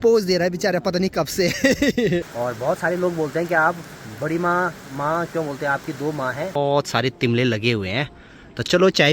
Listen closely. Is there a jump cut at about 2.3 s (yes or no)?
yes